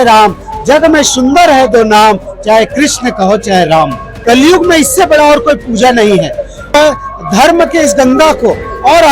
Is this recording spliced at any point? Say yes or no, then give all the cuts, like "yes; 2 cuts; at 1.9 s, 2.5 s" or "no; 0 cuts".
yes; 2 cuts; at 4.1 s, 6.7 s